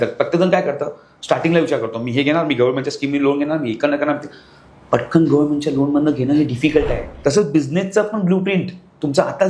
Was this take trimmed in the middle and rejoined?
yes; 1 cut; at 7.1 s

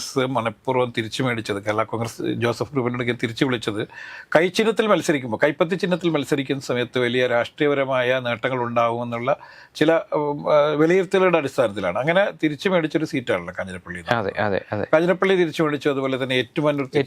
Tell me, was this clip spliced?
no; 0 cuts

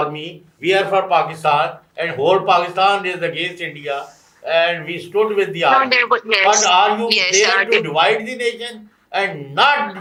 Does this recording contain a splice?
no; 0 cuts

